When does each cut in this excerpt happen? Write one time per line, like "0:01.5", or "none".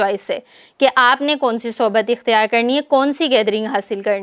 none